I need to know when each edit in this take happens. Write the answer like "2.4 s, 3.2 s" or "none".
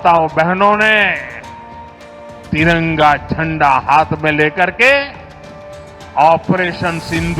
none